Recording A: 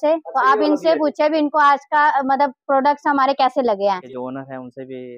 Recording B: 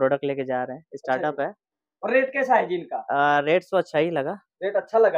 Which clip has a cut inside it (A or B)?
A